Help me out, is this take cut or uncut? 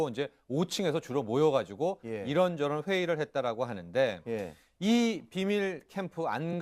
cut